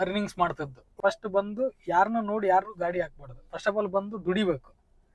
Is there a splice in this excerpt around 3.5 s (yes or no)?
no